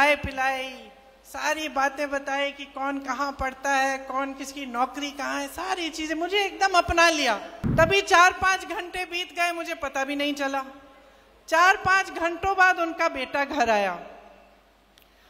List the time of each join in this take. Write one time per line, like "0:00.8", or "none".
0:07.5